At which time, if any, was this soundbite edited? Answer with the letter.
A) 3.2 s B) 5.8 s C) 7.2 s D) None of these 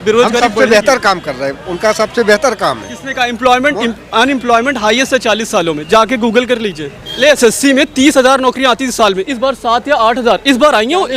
C